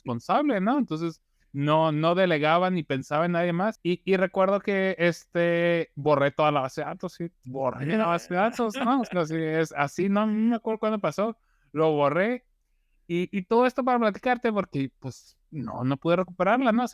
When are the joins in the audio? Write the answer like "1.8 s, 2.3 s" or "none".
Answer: 3.8 s

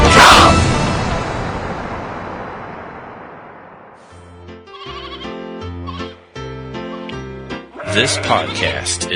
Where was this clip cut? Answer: 4.3 s

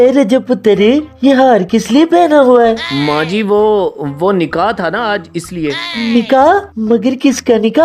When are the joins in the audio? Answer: none

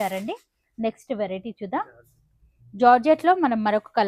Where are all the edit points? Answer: none

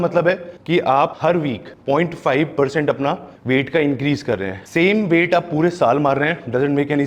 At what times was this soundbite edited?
1.2 s, 4.6 s

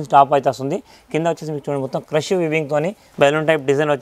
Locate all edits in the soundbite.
3.0 s

